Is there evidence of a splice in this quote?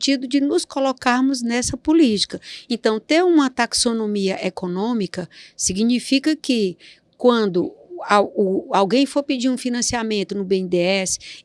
no; 0 cuts

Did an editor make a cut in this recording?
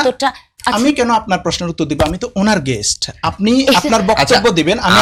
no; 0 cuts

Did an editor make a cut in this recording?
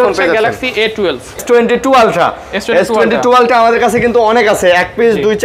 yes; 1 cut; at 1.4 s

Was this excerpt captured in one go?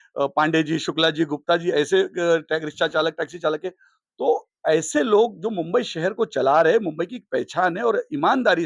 yes; 0 cuts

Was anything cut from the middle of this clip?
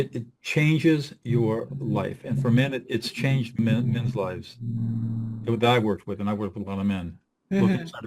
yes; 1 cut; at 3.5 s

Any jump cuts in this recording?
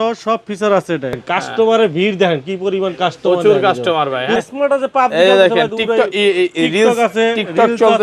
yes; 2 cuts; at 1.1 s, 4.4 s

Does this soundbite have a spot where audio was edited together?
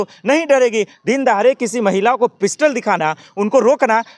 yes; 1 cut; at 0.9 s

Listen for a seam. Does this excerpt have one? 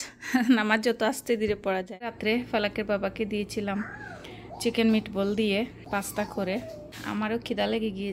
yes; 3 cuts; at 2.2 s, 5.8 s, 6.9 s

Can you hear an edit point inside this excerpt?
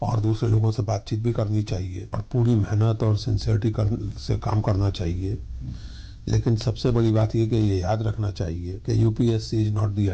yes; 2 cuts; at 2.2 s, 8.7 s

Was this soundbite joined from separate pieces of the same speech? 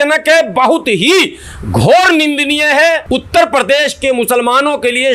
yes; 1 cut; at 3.0 s

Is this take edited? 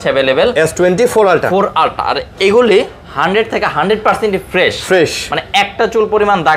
no; 0 cuts

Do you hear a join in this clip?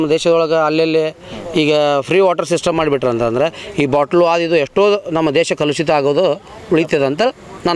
no; 0 cuts

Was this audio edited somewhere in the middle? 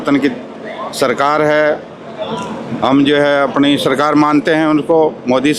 no; 0 cuts

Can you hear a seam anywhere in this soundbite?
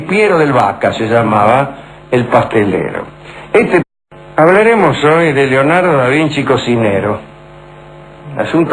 no; 0 cuts

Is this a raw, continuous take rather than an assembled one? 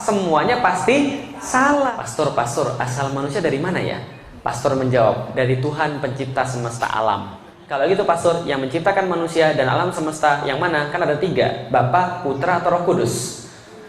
no; 2 cuts; at 2.0 s, 7.6 s

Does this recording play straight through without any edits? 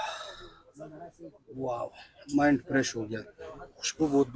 yes; 0 cuts

